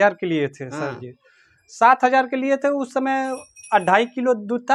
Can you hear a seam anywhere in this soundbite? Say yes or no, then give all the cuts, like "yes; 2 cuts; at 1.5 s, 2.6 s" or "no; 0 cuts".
no; 0 cuts